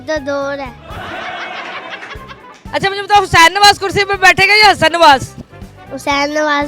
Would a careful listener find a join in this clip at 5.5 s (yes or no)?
no